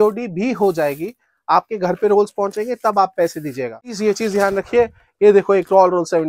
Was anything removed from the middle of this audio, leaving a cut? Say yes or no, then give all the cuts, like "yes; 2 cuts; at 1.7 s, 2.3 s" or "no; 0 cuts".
yes; 1 cut; at 3.9 s